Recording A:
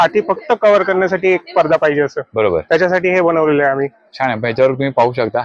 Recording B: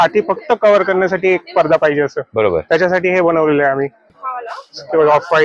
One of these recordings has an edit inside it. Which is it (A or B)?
B